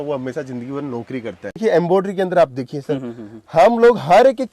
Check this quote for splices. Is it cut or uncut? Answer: cut